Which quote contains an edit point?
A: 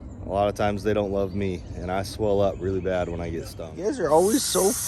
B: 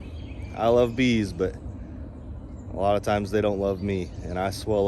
A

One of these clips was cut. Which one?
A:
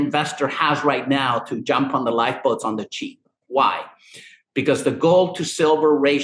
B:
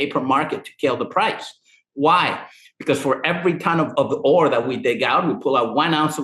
B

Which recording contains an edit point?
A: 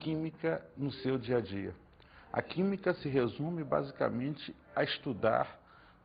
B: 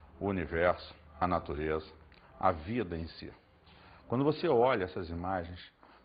A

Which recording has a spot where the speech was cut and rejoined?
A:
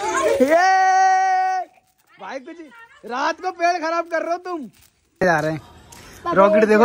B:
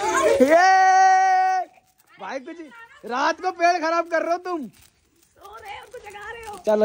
A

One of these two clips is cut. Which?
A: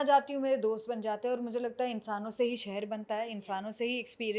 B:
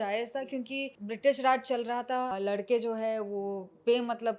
B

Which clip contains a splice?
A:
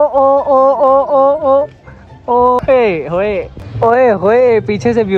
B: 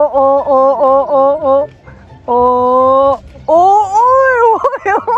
A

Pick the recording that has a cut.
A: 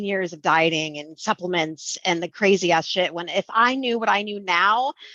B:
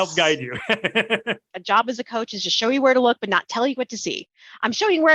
B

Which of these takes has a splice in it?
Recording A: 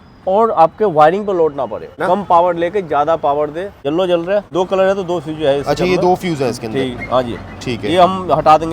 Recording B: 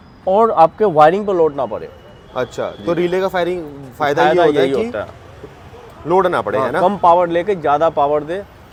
A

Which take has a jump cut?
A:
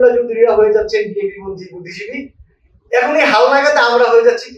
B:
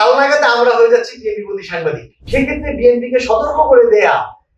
B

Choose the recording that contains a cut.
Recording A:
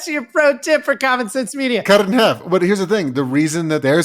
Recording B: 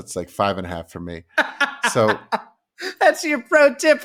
A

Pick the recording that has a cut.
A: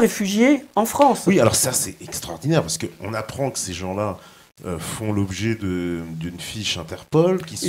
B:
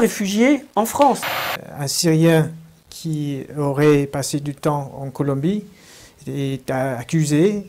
B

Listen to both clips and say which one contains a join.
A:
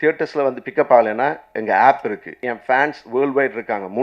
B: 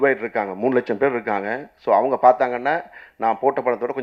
A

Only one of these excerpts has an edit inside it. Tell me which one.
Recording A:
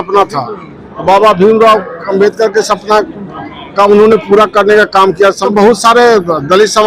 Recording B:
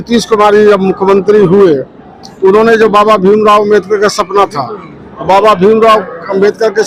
A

